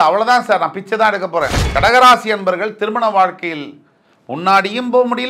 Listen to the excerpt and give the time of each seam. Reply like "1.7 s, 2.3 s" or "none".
1.6 s